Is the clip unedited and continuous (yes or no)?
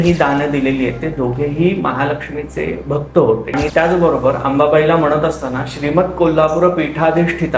no